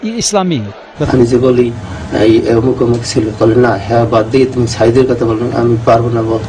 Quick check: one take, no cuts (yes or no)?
no